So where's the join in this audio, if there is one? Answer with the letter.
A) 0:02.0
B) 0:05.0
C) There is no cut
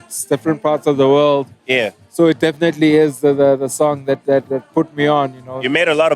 A